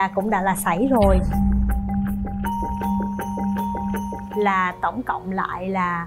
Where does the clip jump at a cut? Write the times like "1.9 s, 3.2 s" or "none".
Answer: 4.2 s